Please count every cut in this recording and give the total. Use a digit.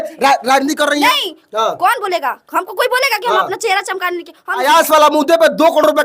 1